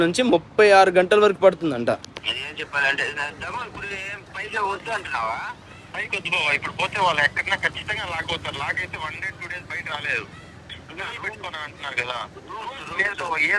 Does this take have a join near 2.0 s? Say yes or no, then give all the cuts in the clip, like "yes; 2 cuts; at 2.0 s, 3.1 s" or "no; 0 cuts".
yes; 1 cut; at 2.0 s